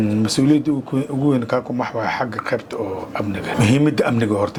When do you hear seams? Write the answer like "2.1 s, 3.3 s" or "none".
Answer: none